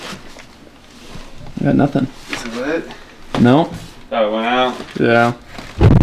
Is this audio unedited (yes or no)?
yes